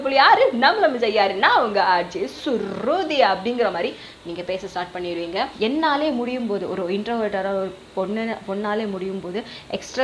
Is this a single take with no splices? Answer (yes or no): no